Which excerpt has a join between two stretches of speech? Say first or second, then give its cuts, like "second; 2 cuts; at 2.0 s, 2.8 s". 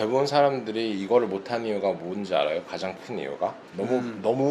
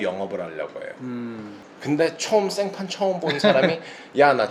second; 1 cut; at 1.6 s